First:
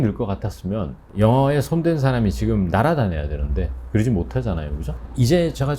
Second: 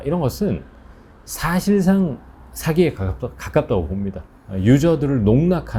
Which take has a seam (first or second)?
first